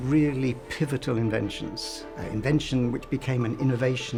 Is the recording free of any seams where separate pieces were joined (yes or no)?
yes